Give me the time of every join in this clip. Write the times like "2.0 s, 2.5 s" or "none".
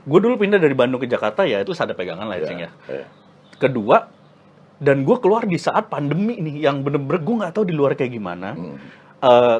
none

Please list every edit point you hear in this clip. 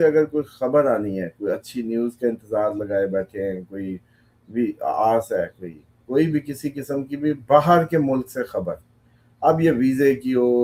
none

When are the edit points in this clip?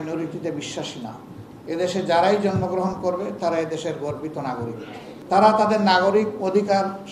1.5 s, 5.1 s

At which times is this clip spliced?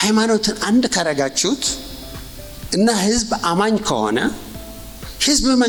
none

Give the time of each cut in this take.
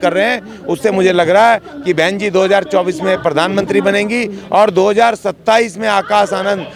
none

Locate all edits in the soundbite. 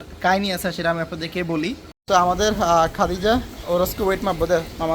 1.9 s

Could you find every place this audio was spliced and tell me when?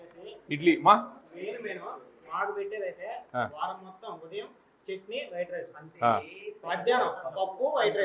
none

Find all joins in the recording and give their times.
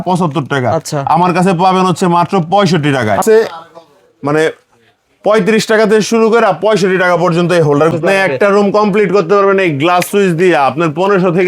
3.2 s, 7.9 s

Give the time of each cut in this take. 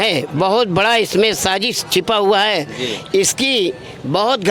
none

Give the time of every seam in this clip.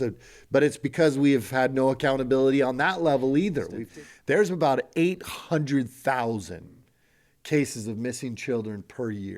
3.8 s

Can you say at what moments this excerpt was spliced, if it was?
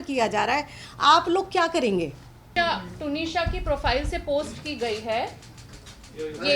2.5 s

